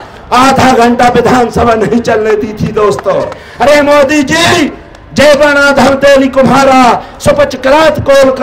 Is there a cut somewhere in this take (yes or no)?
yes